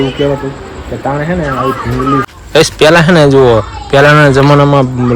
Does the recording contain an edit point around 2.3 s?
yes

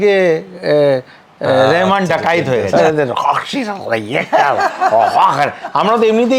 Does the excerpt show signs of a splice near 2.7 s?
yes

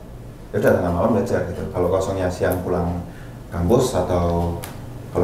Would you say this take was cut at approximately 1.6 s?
no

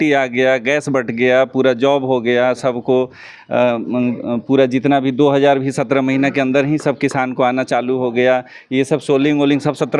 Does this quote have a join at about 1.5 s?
no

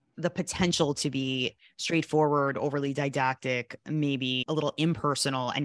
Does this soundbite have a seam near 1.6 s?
yes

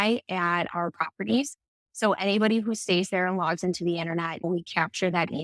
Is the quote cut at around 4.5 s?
yes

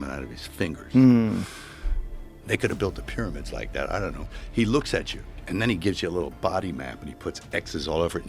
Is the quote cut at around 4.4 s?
yes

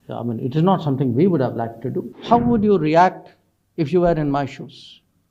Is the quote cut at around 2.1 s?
yes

